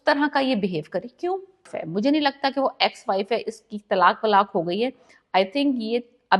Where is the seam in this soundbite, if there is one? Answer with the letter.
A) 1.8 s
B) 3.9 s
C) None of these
A